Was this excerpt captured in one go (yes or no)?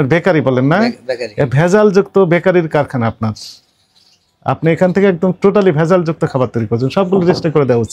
yes